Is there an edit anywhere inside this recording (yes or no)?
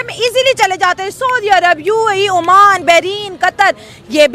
no